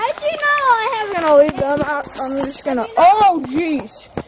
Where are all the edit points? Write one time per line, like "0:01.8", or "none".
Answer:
0:01.1